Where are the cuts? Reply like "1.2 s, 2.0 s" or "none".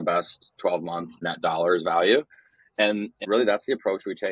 1.2 s, 3.2 s